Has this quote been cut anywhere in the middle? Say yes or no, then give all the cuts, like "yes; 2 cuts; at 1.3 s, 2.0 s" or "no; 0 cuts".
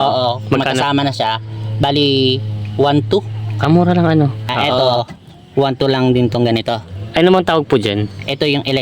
yes; 1 cut; at 4.6 s